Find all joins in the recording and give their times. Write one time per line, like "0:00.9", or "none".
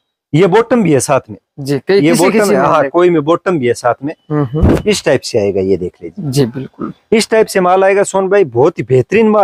none